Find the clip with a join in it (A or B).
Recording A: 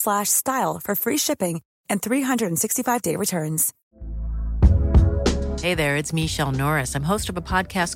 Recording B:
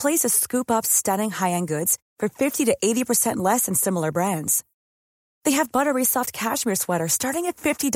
A